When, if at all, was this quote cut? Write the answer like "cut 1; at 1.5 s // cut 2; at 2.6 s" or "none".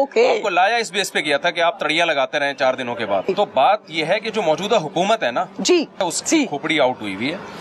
cut 1; at 3.3 s // cut 2; at 6.0 s